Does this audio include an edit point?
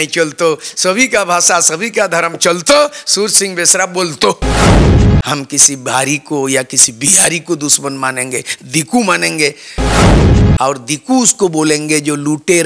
yes; 4 cuts; at 4.4 s, 5.3 s, 9.7 s, 10.6 s

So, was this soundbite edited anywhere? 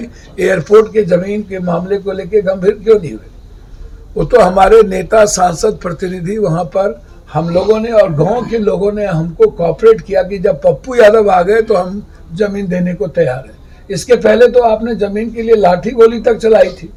no; 0 cuts

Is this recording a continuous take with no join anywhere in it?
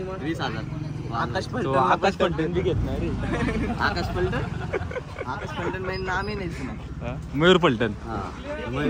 yes; 0 cuts

